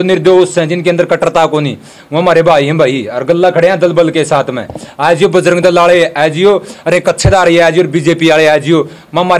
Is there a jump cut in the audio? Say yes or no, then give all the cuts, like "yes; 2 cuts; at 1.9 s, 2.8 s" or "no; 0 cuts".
no; 0 cuts